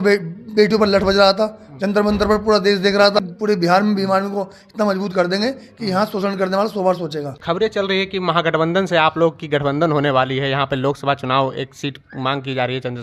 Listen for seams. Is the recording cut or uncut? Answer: cut